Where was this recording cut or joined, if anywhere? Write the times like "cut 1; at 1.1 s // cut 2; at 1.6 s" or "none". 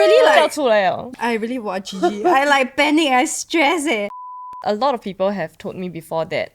cut 1; at 4.4 s

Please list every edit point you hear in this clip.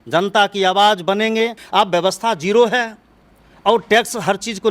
cut 1; at 1.6 s

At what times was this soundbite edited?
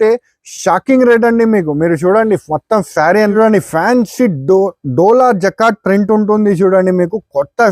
cut 1; at 3.3 s

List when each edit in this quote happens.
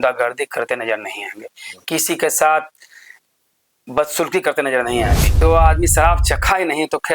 cut 1; at 5.3 s

